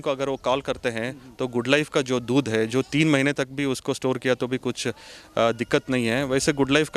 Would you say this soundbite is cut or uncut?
uncut